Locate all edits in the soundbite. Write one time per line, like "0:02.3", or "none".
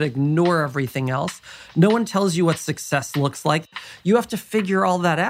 0:03.7